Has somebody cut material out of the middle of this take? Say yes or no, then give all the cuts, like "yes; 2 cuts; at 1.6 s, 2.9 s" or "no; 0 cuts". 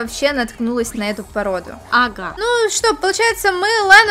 yes; 1 cut; at 2.2 s